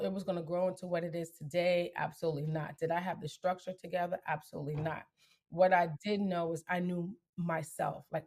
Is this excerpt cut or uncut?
uncut